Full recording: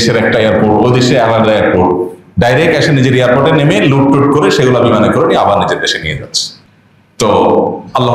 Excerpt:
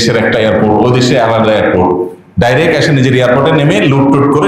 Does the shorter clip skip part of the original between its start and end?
no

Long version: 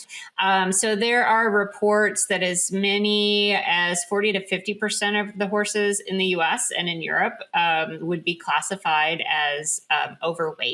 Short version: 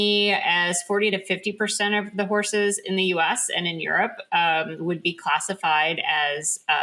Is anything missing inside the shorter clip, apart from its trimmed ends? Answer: no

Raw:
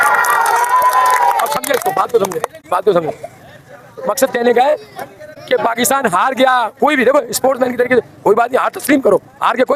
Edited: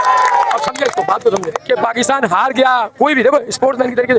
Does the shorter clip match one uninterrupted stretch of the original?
no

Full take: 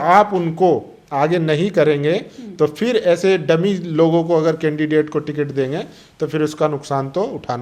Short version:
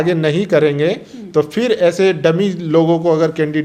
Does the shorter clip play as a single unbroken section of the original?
yes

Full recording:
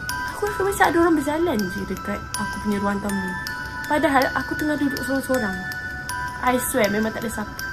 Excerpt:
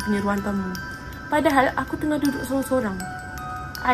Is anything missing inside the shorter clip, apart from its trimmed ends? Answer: no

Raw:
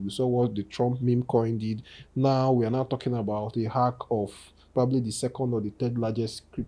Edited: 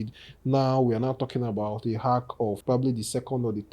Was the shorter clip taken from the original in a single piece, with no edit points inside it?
no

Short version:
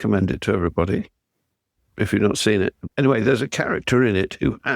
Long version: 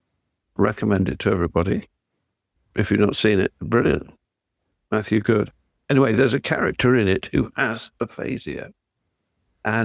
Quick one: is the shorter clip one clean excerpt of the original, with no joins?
no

